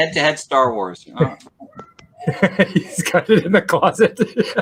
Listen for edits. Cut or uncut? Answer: uncut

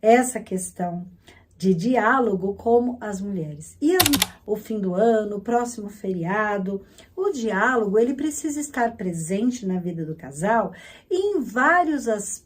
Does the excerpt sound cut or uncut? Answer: cut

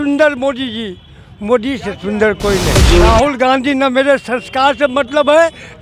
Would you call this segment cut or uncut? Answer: cut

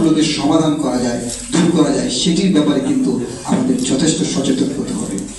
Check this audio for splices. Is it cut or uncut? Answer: uncut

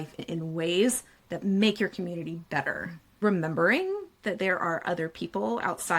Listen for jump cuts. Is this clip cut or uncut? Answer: cut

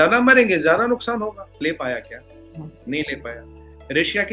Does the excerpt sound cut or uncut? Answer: cut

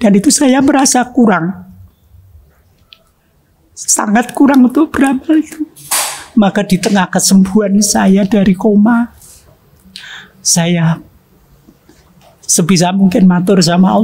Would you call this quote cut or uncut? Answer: uncut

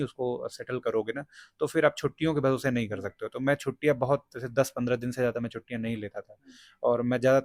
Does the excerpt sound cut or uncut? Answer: uncut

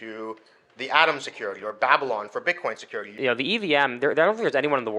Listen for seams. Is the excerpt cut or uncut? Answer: cut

